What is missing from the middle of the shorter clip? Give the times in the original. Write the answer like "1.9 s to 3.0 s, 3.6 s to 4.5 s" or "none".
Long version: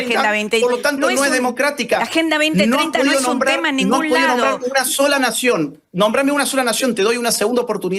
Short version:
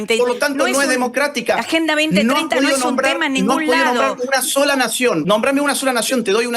5.7 s to 5.9 s